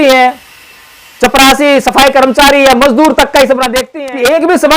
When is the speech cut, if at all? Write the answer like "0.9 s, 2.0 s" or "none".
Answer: 3.8 s